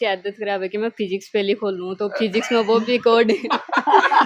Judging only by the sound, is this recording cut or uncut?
uncut